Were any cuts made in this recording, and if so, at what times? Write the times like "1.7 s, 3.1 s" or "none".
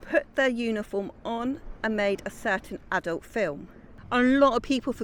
3.9 s